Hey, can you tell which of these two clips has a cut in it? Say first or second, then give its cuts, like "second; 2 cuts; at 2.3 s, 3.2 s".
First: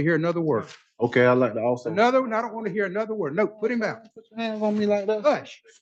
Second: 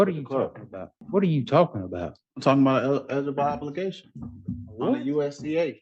second; 1 cut; at 1.0 s